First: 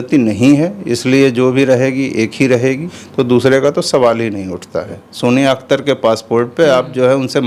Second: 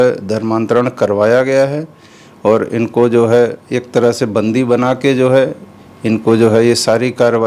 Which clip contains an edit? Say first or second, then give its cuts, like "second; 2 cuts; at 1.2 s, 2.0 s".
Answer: first; 2 cuts; at 3.0 s, 5.0 s